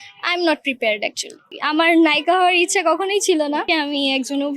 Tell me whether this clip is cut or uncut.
cut